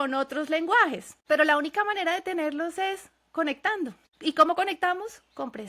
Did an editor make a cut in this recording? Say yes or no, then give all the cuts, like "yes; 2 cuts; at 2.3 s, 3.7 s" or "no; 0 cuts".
yes; 2 cuts; at 1.1 s, 4.1 s